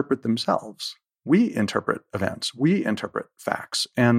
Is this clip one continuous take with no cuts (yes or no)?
yes